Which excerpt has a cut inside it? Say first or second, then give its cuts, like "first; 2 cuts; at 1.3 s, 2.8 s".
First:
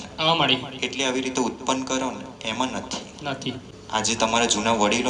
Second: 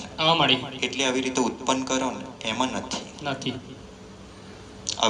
first; 1 cut; at 3.7 s